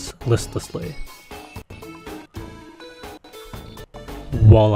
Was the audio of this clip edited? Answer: no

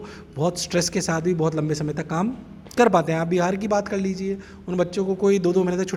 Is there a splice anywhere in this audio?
no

